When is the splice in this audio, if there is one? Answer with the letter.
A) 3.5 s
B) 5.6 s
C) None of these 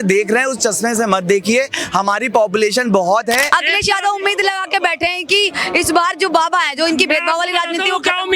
A